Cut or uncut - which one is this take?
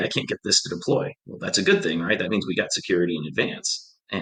uncut